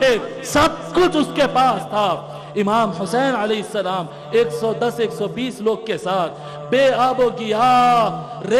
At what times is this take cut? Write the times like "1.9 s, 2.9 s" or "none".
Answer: none